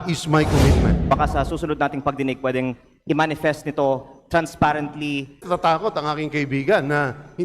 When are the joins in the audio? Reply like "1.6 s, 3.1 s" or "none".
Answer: 1.1 s, 5.4 s